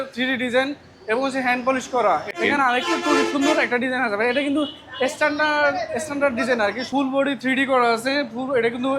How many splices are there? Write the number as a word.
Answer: two